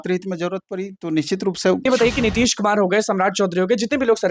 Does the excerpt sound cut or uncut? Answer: cut